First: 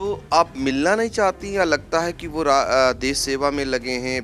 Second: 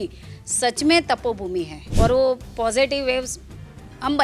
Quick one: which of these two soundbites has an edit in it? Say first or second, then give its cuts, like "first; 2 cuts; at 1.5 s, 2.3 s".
second; 1 cut; at 1.8 s